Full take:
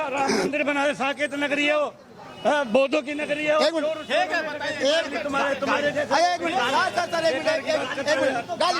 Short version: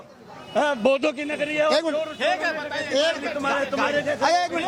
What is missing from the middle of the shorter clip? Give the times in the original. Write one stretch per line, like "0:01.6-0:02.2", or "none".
none